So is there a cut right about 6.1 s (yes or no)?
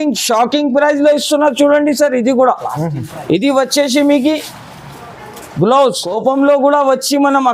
yes